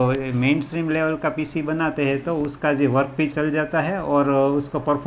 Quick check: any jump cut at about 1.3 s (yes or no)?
no